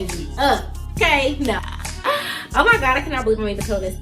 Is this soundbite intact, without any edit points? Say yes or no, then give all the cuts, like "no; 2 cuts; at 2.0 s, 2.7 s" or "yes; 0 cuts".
no; 1 cut; at 1.6 s